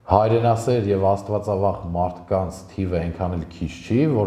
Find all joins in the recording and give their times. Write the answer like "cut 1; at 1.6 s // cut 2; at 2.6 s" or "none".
none

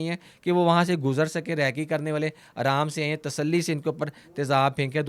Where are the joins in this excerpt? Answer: none

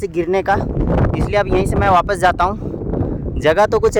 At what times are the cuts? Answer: none

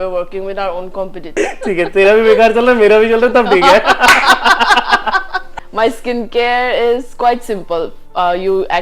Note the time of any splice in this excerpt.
cut 1; at 1.3 s // cut 2; at 5.4 s

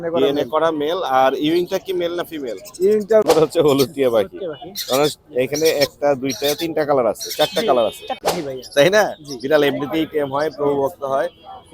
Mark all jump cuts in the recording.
cut 1; at 3.3 s // cut 2; at 8.2 s

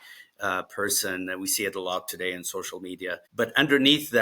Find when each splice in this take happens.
cut 1; at 3.2 s

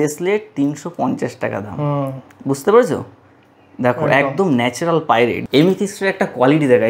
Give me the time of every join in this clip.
none

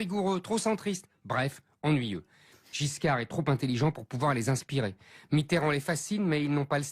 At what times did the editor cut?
cut 1; at 1.0 s

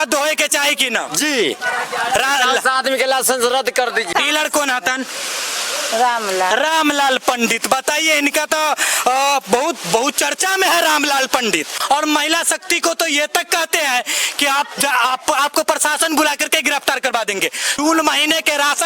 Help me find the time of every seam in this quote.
cut 1; at 4.1 s // cut 2; at 11.7 s // cut 3; at 17.7 s

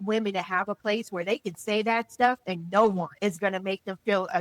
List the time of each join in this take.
cut 1; at 2.5 s // cut 2; at 3.1 s

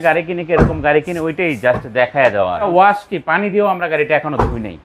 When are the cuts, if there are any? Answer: cut 1; at 2.7 s

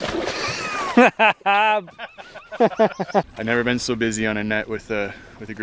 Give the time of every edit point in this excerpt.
cut 1; at 3.3 s

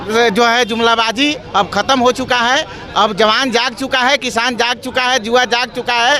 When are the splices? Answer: none

